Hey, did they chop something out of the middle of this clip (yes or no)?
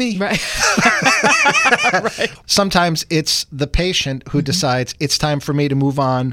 yes